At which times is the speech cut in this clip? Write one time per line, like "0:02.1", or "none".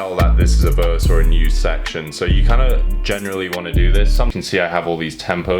0:04.3